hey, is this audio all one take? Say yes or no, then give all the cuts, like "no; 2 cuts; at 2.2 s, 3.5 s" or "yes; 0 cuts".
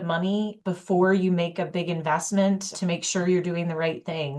no; 1 cut; at 2.7 s